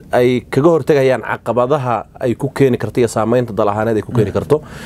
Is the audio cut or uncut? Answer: uncut